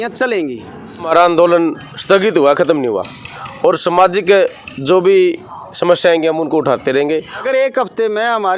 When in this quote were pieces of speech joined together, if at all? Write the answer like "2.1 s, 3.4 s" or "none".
1.1 s, 7.4 s